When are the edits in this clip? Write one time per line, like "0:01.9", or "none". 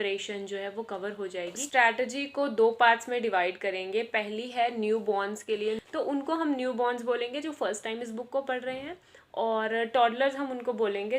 0:01.6
0:05.8